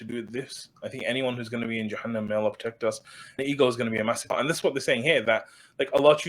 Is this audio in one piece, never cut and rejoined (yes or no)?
no